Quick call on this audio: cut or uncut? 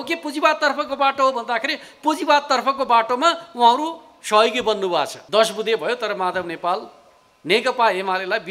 cut